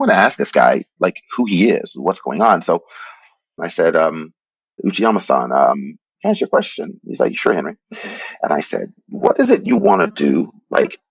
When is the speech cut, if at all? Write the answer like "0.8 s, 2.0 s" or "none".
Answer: 3.6 s, 4.8 s

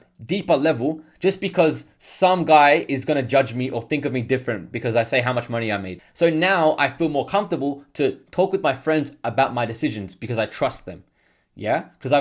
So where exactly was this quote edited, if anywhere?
none

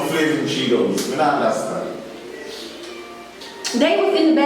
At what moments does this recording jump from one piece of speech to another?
3.4 s

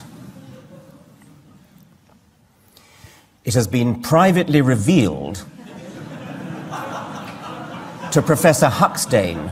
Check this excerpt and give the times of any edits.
none

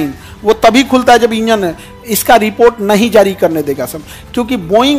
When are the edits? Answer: none

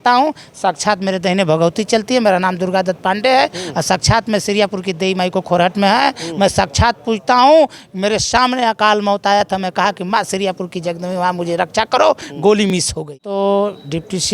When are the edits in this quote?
13.2 s

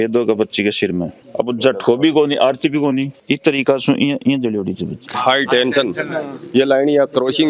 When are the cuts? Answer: 1.2 s, 3.1 s, 5.1 s

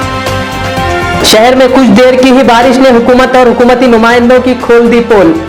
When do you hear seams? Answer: none

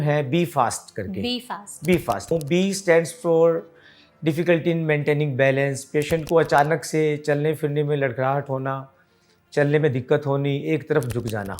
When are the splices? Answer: 2.3 s

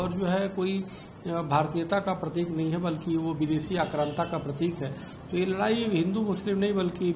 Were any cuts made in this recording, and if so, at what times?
none

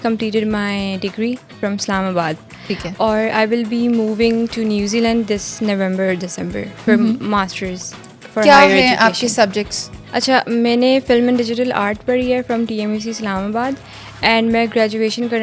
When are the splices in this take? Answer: none

